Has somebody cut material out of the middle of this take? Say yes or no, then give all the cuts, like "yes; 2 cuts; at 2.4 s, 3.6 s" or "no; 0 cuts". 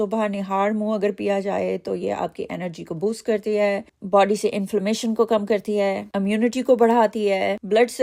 no; 0 cuts